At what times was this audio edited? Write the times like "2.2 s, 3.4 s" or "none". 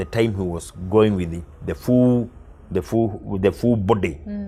none